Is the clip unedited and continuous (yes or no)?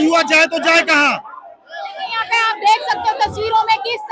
yes